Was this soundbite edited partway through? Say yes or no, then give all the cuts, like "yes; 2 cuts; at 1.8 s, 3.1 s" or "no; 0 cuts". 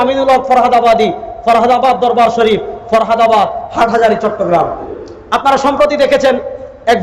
yes; 1 cut; at 4.9 s